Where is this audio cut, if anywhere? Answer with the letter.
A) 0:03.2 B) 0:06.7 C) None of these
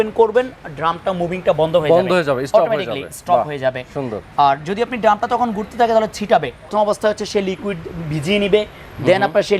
B